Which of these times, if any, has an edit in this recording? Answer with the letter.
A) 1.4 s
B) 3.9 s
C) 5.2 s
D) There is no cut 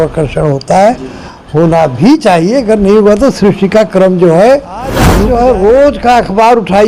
C